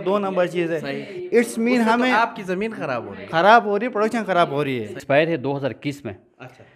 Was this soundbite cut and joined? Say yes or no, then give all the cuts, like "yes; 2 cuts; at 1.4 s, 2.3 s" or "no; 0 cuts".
yes; 1 cut; at 5.0 s